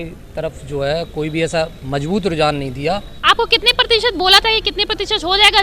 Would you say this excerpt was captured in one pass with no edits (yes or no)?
no